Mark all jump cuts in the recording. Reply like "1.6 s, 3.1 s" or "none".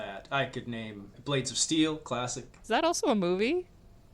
1.1 s, 2.5 s